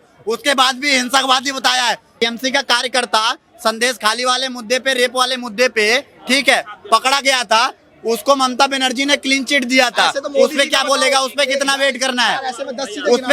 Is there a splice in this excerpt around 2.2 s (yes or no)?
yes